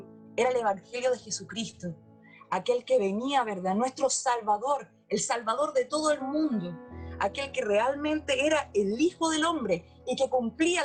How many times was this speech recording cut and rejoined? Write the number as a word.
zero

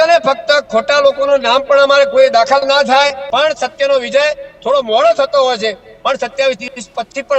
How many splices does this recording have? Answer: one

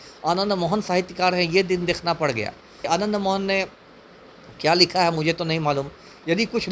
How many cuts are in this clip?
one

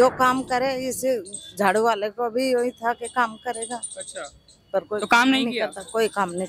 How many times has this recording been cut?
zero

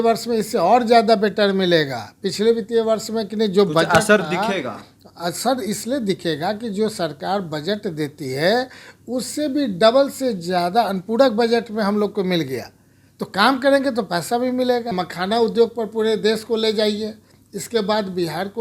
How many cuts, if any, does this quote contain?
one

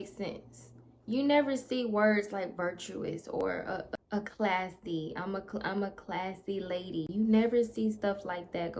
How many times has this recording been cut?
two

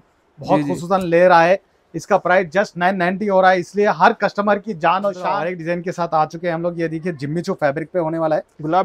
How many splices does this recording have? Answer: one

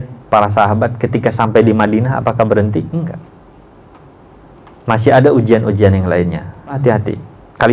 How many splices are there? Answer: one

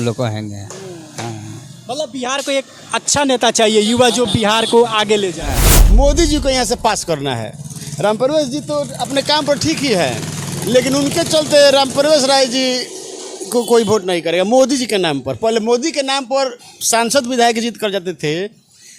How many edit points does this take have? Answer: one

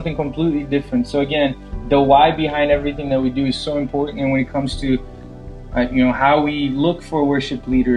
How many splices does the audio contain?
zero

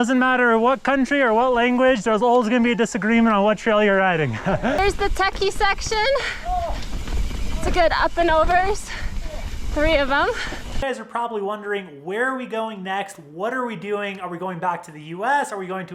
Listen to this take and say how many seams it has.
two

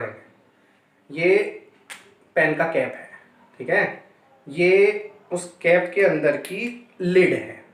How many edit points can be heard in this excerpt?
zero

